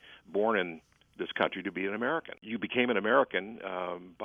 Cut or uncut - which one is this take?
cut